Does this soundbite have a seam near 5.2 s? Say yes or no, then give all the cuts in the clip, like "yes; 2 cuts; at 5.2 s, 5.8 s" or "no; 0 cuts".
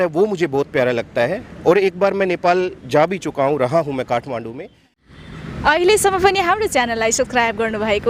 yes; 1 cut; at 5.2 s